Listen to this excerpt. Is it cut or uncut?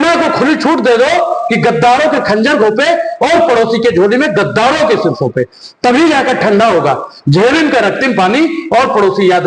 uncut